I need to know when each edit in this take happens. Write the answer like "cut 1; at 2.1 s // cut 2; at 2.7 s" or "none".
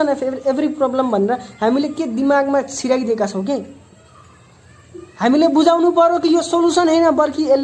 none

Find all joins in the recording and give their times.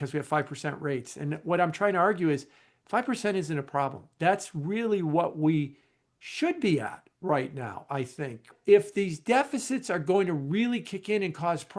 cut 1; at 8.5 s

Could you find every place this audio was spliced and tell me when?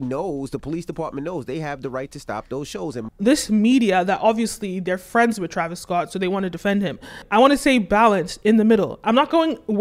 cut 1; at 3.0 s // cut 2; at 7.2 s

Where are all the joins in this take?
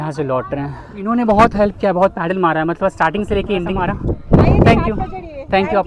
cut 1; at 1.0 s // cut 2; at 3.7 s

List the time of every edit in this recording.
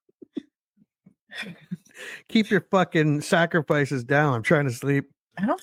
none

